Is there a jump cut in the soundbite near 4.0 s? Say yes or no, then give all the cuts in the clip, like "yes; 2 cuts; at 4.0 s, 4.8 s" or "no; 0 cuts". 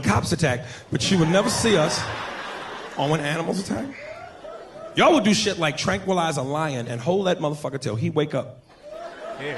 no; 1 cut; at 6.1 s